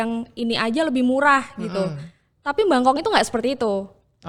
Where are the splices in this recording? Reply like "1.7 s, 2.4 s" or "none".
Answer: none